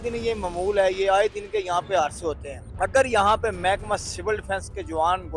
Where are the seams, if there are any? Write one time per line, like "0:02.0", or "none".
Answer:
none